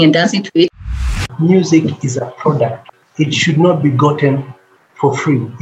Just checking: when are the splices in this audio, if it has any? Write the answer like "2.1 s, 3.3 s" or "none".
1.2 s, 2.8 s

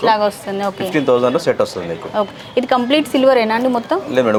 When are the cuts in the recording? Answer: none

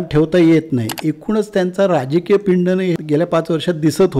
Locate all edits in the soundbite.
1.0 s, 3.0 s

